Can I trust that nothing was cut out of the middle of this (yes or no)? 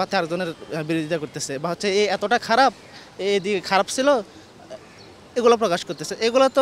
yes